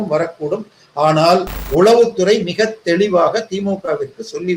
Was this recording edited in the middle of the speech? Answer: yes; 1 cut; at 1.6 s

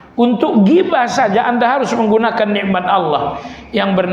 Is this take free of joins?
yes; 0 cuts

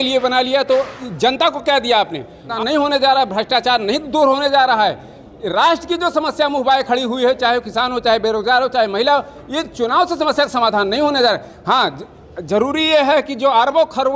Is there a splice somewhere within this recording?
yes; 1 cut; at 2.5 s

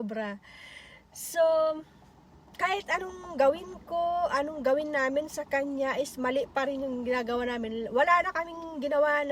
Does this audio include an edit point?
no; 0 cuts

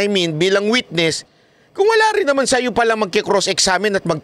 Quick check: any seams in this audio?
no; 0 cuts

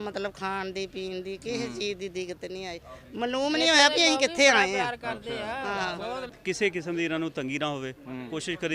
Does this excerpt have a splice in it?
yes; 1 cut; at 6.3 s

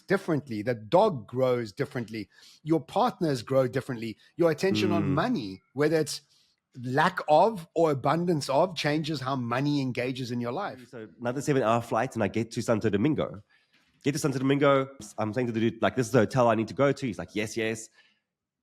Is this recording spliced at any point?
yes; 2 cuts; at 11.2 s, 15.1 s

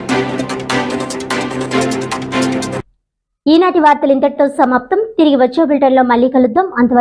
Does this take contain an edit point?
no; 0 cuts

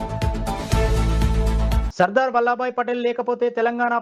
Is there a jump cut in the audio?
no; 0 cuts

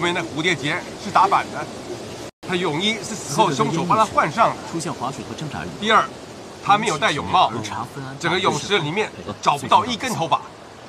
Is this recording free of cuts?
yes; 0 cuts

